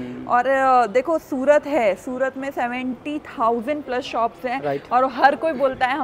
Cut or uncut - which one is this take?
uncut